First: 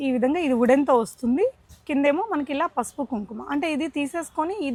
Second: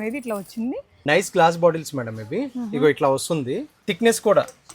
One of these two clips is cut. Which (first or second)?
second